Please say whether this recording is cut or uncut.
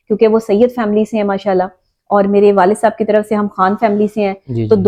uncut